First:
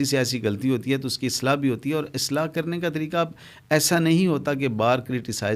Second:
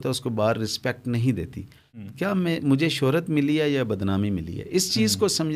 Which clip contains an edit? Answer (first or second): second